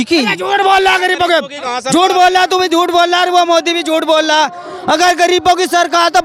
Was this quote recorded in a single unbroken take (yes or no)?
yes